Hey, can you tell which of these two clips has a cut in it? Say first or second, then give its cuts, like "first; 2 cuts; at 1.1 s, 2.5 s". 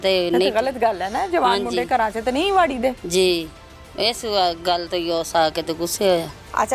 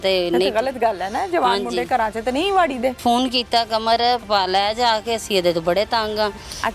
second; 2 cuts; at 3.0 s, 4.2 s